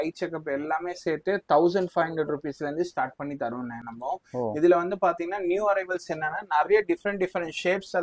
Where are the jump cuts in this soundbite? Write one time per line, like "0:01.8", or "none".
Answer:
none